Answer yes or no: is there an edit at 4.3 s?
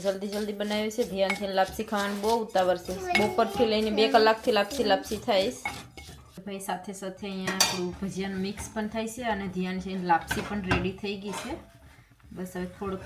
no